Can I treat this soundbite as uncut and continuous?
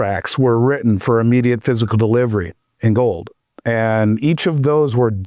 yes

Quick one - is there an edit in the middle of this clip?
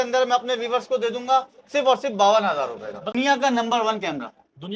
yes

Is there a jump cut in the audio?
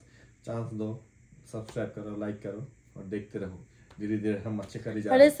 no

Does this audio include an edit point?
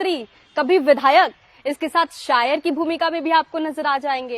no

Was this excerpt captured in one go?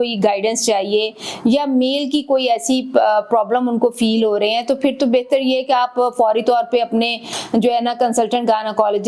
yes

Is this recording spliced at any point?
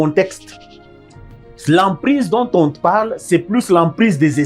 no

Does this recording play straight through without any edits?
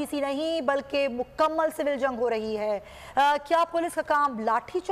yes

